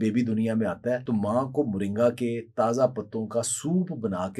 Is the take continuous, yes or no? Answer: no